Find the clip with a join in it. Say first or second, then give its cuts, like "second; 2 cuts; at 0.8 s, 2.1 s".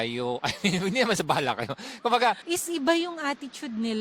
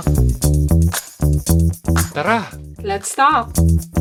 first; 1 cut; at 2.4 s